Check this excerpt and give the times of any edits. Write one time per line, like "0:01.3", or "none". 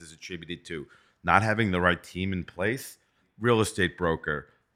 0:03.3